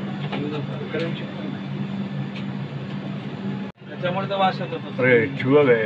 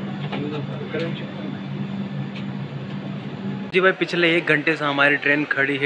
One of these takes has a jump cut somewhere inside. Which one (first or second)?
second